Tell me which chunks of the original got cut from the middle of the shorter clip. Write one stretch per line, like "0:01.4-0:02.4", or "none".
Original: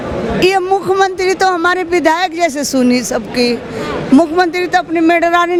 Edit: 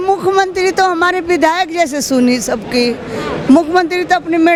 none